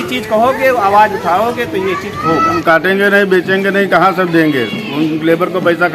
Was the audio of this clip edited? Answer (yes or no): yes